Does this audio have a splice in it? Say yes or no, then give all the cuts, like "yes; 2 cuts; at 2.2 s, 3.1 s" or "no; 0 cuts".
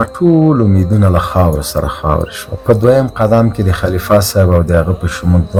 no; 0 cuts